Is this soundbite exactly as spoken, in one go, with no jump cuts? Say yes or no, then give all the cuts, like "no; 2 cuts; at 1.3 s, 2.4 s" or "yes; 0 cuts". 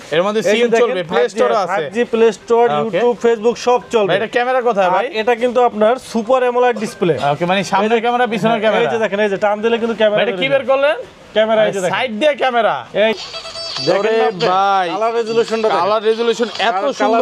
no; 1 cut; at 13.1 s